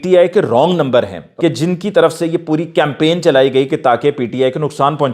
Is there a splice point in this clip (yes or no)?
yes